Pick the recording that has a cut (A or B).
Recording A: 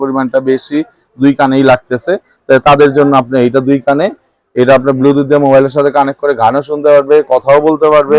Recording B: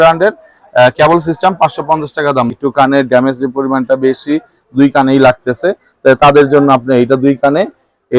B